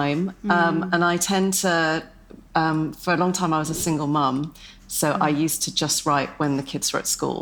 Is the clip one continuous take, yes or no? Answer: yes